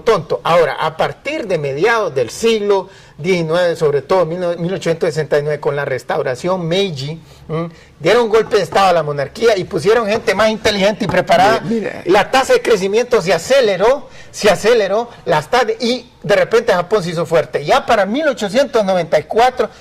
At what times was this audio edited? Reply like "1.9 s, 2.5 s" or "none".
16.4 s